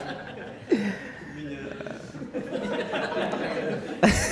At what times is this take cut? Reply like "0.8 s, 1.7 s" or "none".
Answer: none